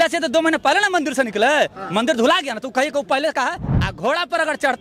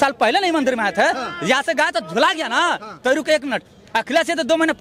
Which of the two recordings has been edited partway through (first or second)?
first